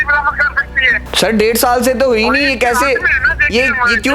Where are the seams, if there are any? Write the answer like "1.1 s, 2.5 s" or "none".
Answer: 1.0 s